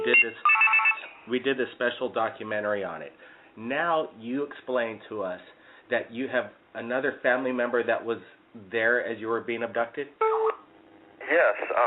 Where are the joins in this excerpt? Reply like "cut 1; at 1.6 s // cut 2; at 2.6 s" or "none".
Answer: cut 1; at 3.9 s

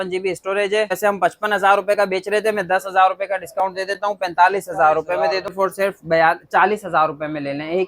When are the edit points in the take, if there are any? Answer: cut 1; at 1.0 s // cut 2; at 5.5 s

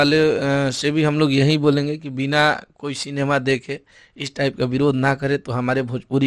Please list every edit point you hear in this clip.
none

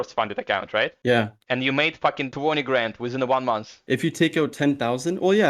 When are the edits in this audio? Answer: cut 1; at 1.0 s // cut 2; at 2.3 s // cut 3; at 3.7 s

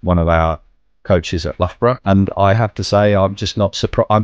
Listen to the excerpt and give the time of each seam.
cut 1; at 2.0 s

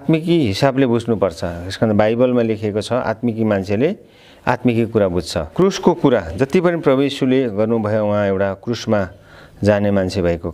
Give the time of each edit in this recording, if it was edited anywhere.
cut 1; at 5.5 s

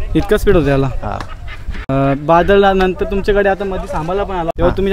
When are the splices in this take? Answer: none

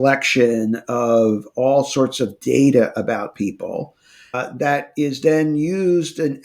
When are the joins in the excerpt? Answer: cut 1; at 4.3 s

